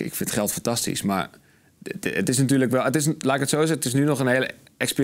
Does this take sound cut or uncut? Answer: uncut